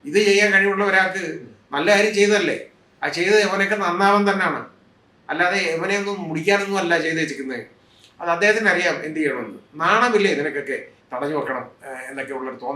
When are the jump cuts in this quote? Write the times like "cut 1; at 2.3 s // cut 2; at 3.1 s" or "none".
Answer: cut 1; at 10.9 s